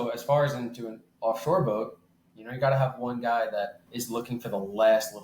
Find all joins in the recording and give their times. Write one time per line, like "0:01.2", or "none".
0:03.9